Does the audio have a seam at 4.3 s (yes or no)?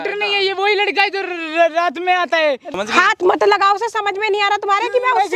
no